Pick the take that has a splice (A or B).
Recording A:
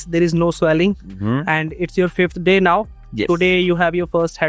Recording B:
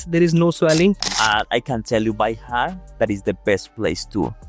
B